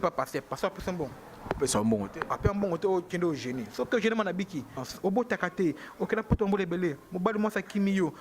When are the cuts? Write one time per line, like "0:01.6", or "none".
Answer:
0:04.9